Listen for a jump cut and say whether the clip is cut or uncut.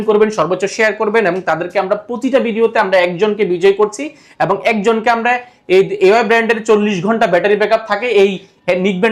uncut